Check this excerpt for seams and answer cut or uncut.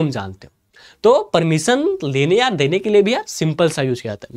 uncut